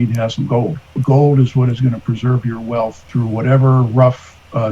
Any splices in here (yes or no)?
yes